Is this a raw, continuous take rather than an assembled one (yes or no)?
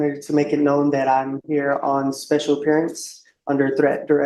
yes